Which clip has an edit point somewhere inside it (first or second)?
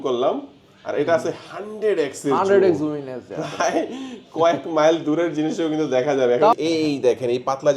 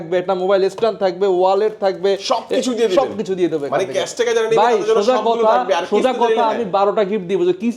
first